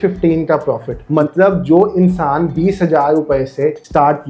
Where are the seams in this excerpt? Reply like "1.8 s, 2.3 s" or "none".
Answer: 1.0 s